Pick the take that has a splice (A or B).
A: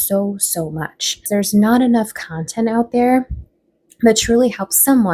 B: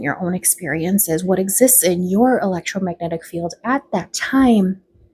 A